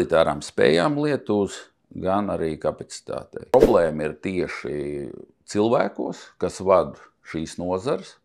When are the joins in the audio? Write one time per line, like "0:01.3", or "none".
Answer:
0:03.5